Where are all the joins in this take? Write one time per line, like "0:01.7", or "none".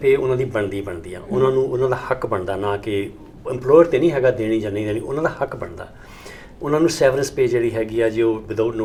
none